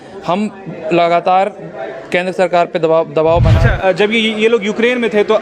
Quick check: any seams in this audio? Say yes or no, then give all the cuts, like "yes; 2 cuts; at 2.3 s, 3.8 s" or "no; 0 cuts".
yes; 1 cut; at 3.5 s